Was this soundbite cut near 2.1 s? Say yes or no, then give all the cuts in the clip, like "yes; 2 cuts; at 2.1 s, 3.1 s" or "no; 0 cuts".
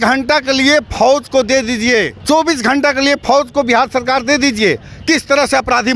yes; 1 cut; at 2.1 s